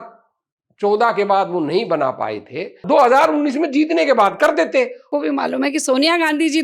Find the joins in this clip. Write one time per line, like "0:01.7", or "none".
0:05.1